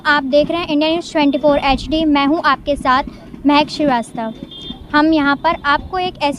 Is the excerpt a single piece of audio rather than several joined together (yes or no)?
yes